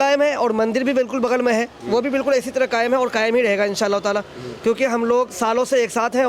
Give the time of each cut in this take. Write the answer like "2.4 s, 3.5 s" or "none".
none